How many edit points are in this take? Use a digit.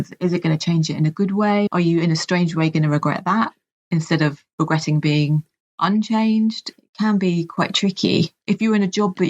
3